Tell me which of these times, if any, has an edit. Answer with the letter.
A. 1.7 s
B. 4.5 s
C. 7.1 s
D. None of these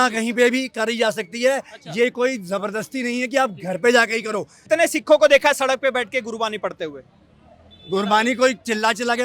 B